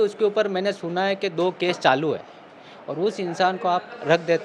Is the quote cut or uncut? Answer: uncut